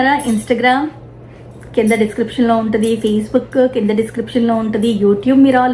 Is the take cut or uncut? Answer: uncut